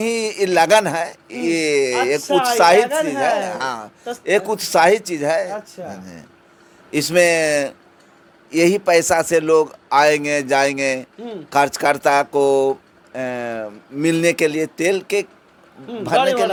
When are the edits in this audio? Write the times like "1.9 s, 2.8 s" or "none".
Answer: none